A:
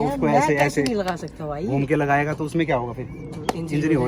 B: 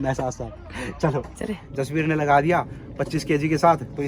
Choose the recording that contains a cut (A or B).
B